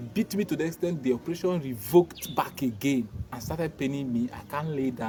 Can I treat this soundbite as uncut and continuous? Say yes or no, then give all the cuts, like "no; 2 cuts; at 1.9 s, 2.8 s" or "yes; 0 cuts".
yes; 0 cuts